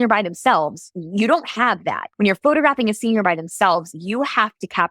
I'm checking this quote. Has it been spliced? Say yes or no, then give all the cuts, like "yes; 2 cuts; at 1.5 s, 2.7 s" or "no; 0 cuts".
yes; 1 cut; at 2.0 s